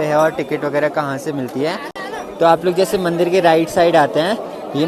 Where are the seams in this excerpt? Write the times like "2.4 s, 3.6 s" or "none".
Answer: none